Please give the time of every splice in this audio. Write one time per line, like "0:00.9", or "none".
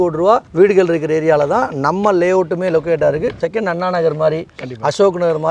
none